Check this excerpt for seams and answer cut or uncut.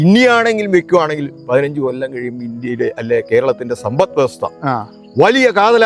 uncut